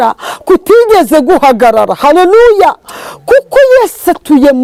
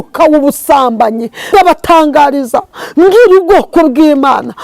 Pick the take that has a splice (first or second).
second